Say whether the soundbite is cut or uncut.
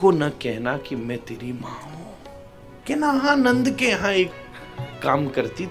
cut